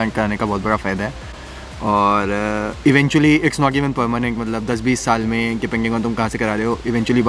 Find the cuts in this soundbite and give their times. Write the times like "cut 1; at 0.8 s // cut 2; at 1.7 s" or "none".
none